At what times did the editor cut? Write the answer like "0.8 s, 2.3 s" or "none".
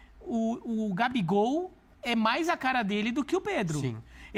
none